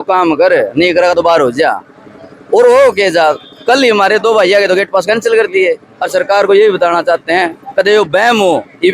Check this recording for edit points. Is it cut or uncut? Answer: cut